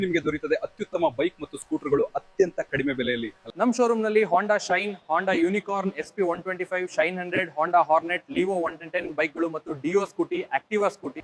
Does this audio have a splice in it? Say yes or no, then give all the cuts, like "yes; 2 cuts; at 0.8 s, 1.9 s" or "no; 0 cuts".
no; 0 cuts